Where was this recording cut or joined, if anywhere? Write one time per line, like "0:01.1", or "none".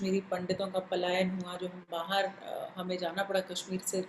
none